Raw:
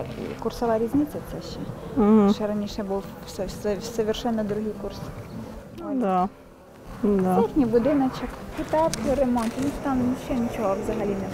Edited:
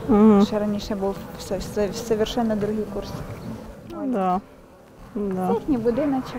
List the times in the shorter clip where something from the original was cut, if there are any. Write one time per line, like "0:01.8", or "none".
none